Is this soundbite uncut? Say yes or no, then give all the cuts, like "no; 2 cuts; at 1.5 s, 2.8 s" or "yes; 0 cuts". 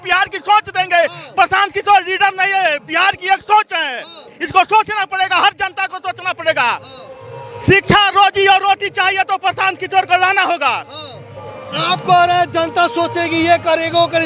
yes; 0 cuts